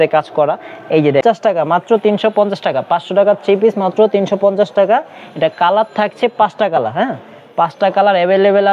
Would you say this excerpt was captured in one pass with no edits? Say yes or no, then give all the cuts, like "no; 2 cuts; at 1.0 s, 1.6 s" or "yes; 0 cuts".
no; 1 cut; at 1.2 s